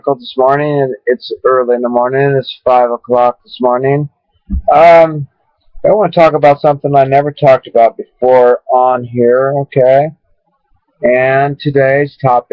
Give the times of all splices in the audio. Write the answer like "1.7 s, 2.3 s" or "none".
none